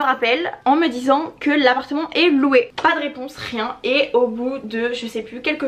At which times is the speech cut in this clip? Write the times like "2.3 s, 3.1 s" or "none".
2.7 s